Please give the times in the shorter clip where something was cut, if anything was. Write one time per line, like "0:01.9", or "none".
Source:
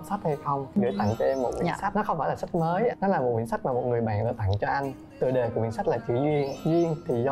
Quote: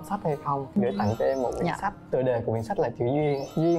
0:01.9